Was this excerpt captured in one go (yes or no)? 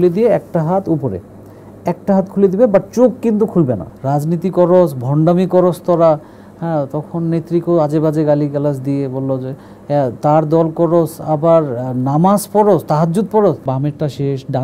no